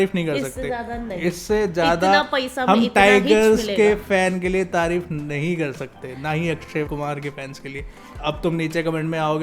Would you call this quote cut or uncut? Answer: uncut